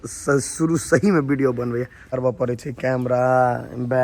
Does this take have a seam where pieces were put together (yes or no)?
yes